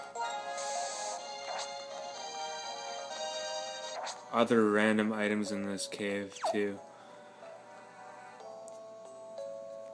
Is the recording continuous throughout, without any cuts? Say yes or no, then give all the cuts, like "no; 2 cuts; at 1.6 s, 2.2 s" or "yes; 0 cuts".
yes; 0 cuts